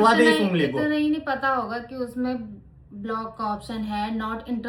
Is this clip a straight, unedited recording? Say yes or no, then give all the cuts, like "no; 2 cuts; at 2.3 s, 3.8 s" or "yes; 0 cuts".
yes; 0 cuts